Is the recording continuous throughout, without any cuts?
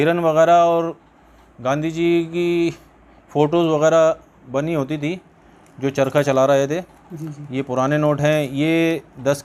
yes; 0 cuts

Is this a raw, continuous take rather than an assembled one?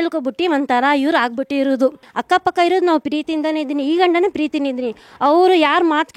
no; 1 cut; at 2.1 s

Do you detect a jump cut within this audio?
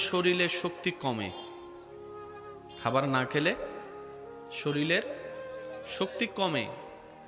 yes; 2 cuts; at 1.3 s, 2.8 s

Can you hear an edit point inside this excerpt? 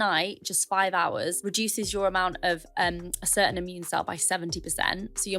yes; 1 cut; at 1.4 s

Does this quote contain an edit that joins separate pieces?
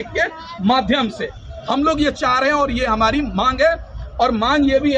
no; 0 cuts

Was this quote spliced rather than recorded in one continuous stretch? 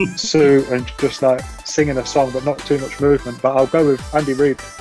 no; 0 cuts

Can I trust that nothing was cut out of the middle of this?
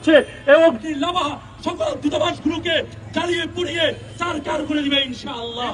yes; 0 cuts

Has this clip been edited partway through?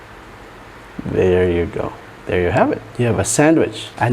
yes; 1 cut; at 2.9 s

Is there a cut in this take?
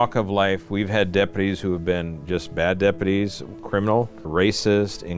yes; 1 cut; at 4.2 s

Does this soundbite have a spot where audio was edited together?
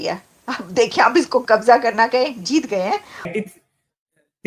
yes; 1 cut; at 3.3 s

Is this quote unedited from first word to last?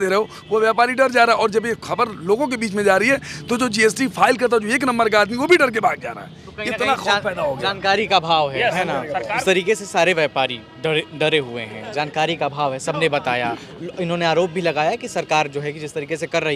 yes; 0 cuts

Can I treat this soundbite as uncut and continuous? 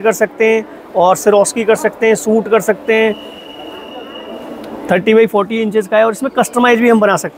yes; 0 cuts

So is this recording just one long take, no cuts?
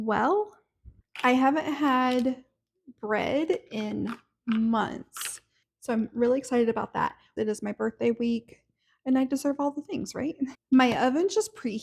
no; 3 cuts; at 1.0 s, 7.2 s, 10.6 s

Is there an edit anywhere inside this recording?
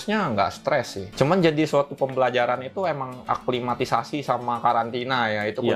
no; 0 cuts

